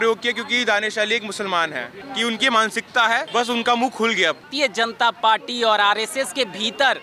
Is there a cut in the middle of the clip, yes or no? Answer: yes